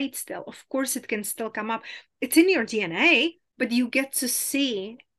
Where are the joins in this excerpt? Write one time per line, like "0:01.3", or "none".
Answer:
0:03.4